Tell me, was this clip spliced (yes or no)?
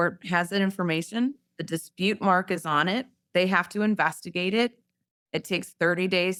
no